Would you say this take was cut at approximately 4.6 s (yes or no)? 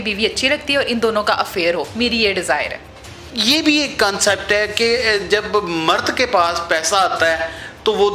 no